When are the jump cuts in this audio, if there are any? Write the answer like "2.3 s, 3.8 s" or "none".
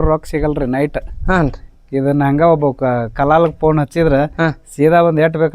none